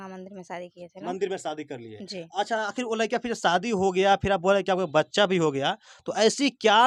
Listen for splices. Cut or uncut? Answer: uncut